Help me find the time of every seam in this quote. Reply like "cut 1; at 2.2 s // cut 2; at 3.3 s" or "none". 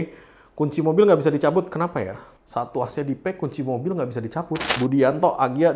cut 1; at 4.7 s